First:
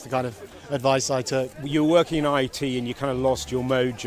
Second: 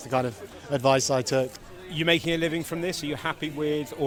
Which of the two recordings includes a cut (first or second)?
first